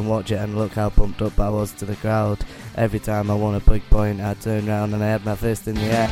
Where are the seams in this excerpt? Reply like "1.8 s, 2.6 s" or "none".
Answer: none